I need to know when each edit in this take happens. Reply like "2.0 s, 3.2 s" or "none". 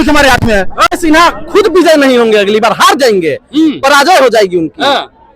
1.0 s